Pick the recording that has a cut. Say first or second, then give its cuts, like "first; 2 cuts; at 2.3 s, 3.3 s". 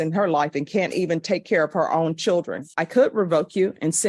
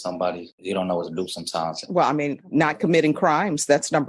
first; 1 cut; at 2.7 s